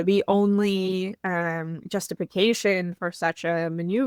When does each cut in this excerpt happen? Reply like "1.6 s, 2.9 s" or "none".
none